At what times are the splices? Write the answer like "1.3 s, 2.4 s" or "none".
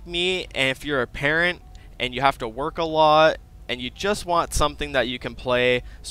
none